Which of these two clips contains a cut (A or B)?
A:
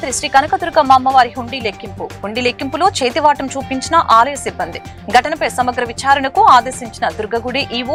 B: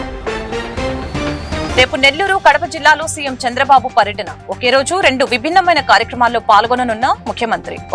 B